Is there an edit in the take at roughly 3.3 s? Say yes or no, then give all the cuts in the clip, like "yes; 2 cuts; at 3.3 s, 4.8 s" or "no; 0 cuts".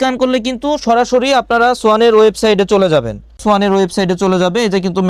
yes; 1 cut; at 3.3 s